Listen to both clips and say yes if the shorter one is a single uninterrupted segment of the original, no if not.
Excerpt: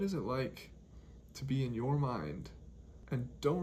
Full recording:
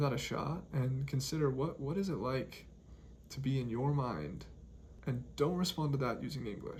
yes